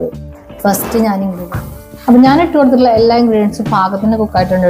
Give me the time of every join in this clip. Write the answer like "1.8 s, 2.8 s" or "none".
1.4 s